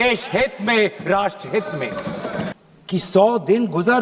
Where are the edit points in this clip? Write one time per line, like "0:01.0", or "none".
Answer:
0:02.6